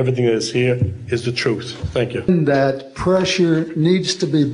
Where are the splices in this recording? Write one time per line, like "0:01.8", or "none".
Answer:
0:02.3